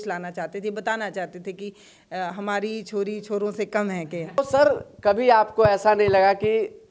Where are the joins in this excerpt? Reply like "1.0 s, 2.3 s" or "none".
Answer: 4.4 s